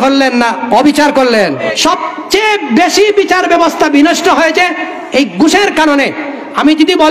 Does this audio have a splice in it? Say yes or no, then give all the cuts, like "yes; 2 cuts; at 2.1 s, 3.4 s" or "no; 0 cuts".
yes; 1 cut; at 1.7 s